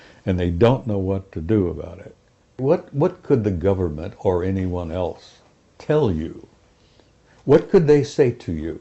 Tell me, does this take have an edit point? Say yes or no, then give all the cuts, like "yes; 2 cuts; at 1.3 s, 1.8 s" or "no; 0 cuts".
yes; 1 cut; at 2.6 s